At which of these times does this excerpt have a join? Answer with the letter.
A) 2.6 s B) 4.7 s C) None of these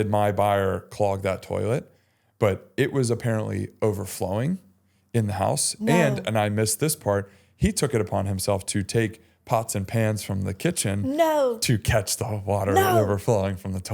C